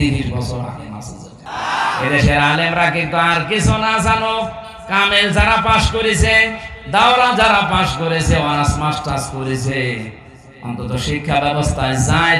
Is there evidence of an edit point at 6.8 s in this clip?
no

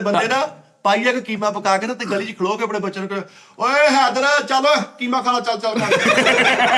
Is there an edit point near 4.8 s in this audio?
no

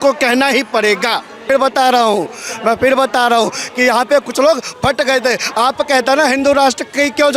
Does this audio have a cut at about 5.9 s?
no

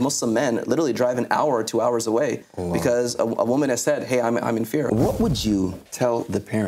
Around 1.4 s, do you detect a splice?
no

